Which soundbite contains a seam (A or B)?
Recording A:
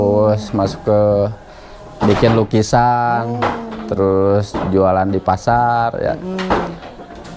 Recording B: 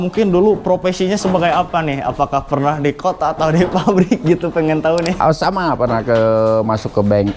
B